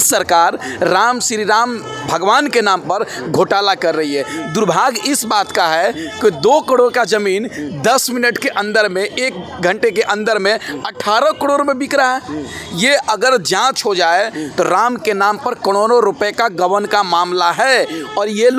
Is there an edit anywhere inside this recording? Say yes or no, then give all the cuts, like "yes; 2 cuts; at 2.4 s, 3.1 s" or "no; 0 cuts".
no; 0 cuts